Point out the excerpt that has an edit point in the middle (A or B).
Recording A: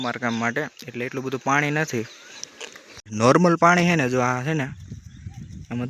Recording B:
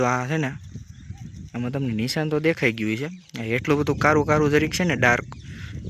A